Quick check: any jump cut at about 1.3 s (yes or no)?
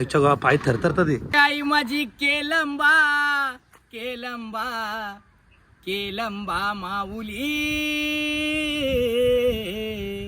yes